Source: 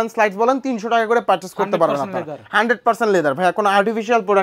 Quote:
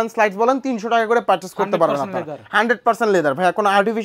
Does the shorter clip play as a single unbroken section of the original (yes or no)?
yes